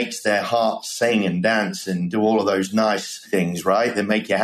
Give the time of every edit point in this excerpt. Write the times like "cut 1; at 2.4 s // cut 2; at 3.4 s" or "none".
cut 1; at 3.3 s